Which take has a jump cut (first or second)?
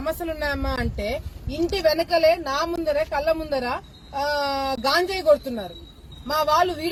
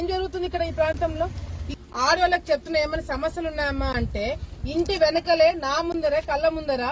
second